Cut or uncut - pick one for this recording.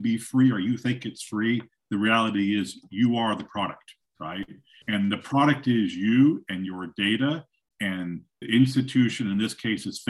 cut